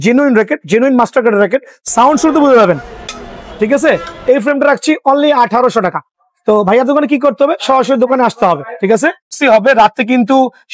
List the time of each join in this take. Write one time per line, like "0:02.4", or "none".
0:09.4